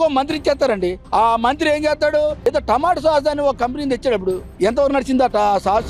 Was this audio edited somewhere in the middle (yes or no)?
yes